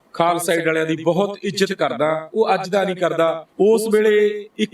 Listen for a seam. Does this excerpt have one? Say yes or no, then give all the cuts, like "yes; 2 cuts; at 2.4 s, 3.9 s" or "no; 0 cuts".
yes; 1 cut; at 3.4 s